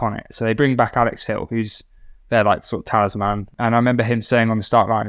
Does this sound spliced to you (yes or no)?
yes